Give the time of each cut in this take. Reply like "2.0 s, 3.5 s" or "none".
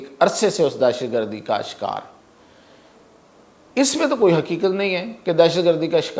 none